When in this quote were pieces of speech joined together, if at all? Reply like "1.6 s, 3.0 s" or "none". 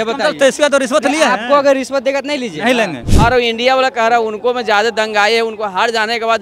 3.1 s